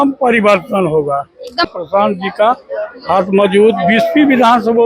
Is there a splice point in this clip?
yes; 1 cut; at 1.6 s

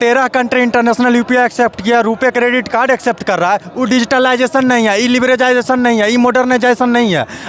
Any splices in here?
no; 0 cuts

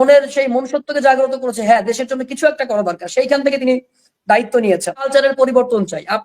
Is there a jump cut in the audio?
yes; 1 cut; at 5.1 s

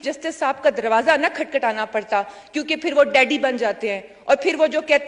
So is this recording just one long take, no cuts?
yes; 0 cuts

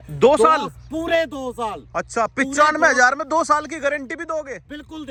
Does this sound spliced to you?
no; 0 cuts

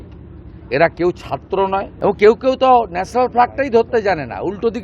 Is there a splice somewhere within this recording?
yes; 1 cut; at 1.9 s

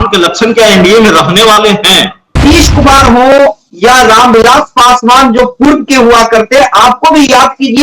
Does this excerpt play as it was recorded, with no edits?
no; 1 cut; at 2.4 s

